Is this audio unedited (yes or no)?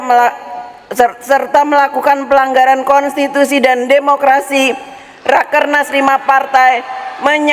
yes